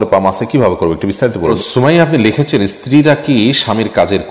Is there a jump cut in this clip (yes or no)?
yes